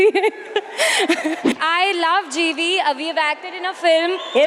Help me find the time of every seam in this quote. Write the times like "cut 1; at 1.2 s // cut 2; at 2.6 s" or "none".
cut 1; at 1.4 s